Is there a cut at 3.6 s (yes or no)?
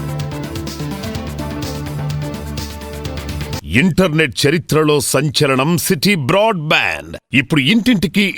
yes